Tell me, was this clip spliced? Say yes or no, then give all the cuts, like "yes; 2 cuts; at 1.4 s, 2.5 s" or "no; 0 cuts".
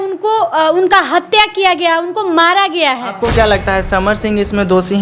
yes; 1 cut; at 3.2 s